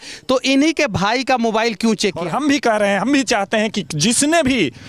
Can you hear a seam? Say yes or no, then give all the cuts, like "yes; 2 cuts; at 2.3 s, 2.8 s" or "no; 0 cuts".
yes; 1 cut; at 2.2 s